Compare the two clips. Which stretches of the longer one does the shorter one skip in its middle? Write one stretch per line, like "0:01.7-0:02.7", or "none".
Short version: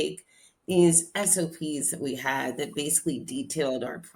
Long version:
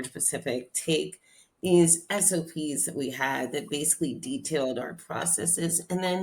none